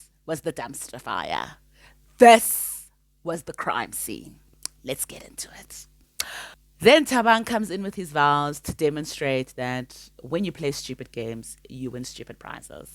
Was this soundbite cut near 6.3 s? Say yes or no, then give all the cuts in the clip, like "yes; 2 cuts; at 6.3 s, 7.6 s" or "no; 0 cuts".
yes; 1 cut; at 6.3 s